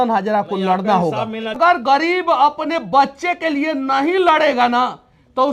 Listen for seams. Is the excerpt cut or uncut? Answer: cut